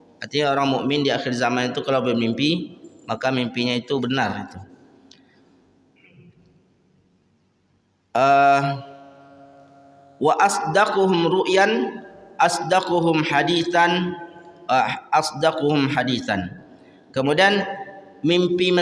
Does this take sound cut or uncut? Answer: uncut